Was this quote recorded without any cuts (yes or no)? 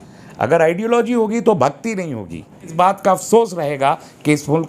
no